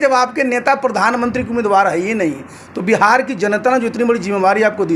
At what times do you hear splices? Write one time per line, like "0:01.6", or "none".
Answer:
none